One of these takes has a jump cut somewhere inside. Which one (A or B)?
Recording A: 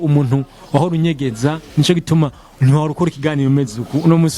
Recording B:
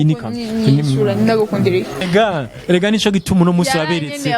B